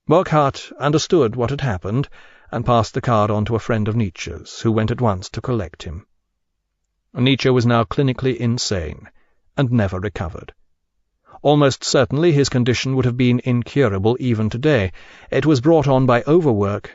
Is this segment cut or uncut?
cut